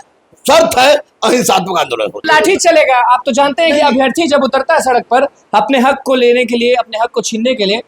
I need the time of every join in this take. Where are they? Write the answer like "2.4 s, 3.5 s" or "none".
2.2 s